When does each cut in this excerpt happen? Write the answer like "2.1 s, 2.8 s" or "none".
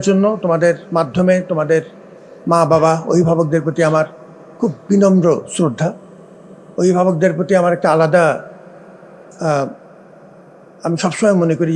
none